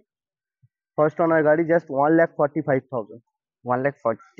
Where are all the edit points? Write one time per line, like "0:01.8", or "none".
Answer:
none